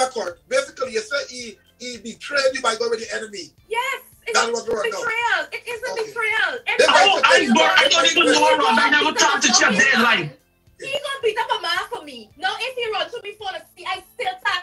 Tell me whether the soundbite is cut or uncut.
uncut